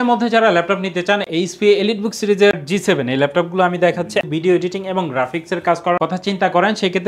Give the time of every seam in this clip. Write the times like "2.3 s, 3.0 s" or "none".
2.5 s, 4.3 s